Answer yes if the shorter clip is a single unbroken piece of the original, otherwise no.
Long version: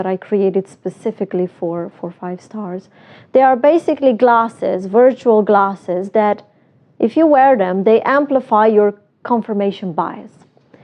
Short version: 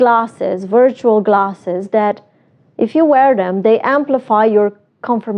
yes